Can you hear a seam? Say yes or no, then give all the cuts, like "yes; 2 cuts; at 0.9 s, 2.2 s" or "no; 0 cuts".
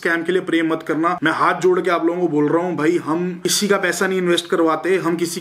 no; 0 cuts